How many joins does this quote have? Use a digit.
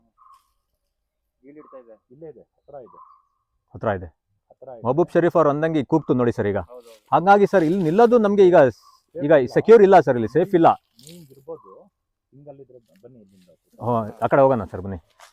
0